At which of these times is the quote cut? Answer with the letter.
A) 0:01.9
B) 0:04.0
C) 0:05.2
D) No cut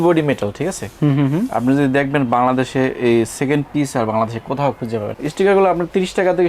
C